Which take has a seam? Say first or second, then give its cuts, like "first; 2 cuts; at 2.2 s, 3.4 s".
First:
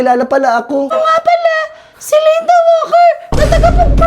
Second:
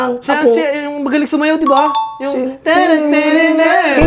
first; 1 cut; at 0.9 s